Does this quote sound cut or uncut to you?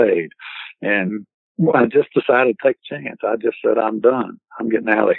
cut